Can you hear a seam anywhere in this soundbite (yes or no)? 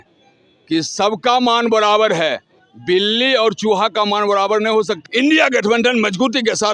yes